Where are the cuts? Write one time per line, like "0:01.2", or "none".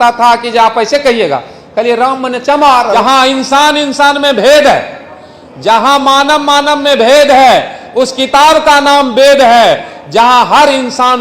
0:02.9